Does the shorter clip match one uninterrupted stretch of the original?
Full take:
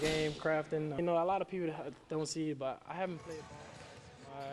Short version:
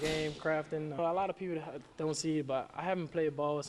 no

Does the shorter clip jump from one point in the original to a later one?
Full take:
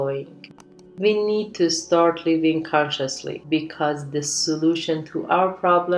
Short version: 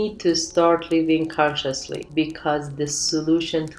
no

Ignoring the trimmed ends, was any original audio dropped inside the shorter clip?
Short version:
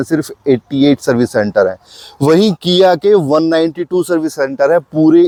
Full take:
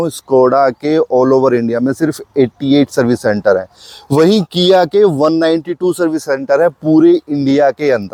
no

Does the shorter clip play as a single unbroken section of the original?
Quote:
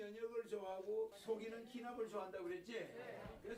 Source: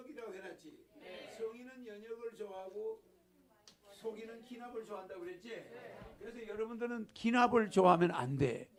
no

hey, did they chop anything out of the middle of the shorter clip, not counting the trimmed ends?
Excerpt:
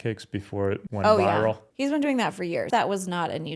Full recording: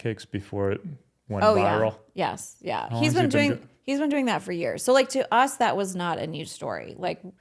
yes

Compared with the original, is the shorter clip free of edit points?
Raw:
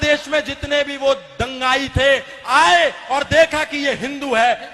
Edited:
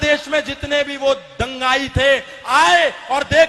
yes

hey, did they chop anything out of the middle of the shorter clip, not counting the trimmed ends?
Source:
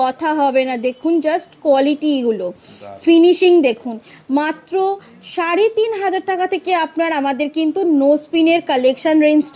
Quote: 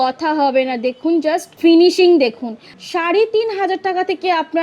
yes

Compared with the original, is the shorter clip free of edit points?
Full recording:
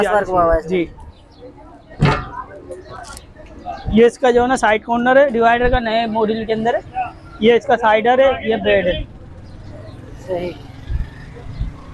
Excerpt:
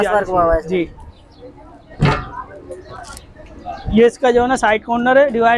yes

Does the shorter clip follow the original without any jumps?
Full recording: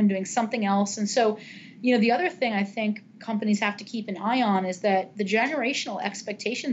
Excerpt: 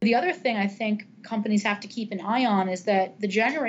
yes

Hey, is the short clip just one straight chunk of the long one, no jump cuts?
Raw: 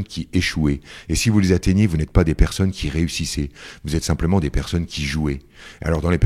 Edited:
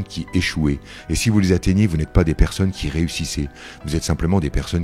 yes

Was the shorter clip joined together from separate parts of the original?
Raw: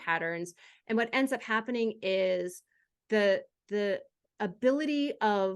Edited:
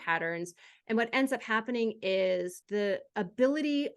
yes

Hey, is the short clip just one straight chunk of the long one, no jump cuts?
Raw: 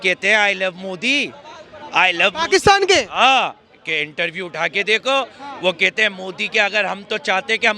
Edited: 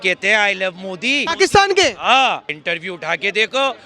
no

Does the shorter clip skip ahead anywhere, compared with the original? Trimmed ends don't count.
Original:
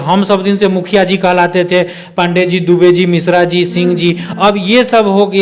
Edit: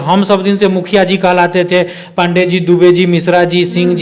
no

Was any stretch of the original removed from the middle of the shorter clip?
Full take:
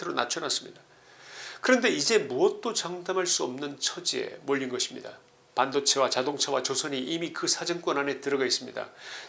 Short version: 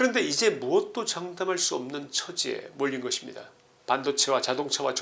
no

